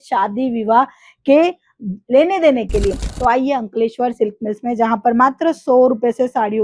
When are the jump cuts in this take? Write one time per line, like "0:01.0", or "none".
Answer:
0:03.0